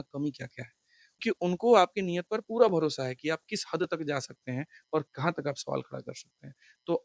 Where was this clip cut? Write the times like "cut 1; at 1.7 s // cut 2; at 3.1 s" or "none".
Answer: cut 1; at 1.2 s